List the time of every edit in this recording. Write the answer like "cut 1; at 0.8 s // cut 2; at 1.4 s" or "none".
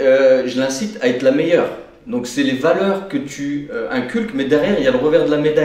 none